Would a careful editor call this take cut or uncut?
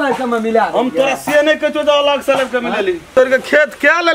cut